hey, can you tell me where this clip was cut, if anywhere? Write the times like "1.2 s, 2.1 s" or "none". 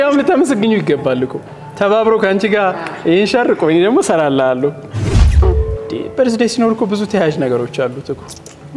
5.4 s